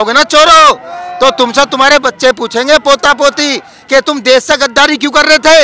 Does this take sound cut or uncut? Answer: uncut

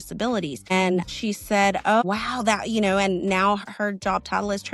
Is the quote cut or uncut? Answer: cut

